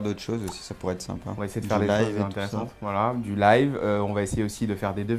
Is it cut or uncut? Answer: uncut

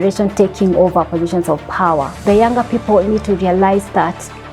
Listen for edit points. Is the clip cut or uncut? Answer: cut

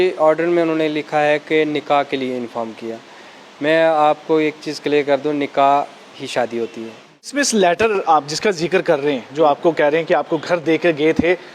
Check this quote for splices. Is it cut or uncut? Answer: cut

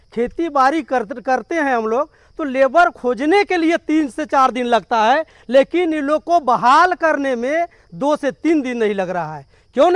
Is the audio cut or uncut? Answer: uncut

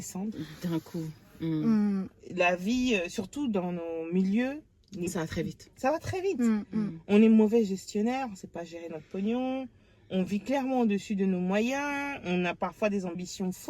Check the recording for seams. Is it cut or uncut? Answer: uncut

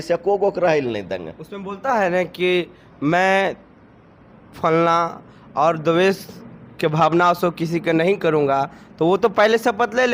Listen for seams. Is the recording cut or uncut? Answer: uncut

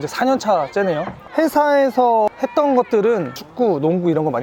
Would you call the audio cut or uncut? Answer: uncut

